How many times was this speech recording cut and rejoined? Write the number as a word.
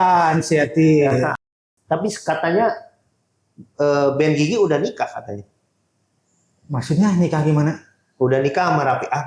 one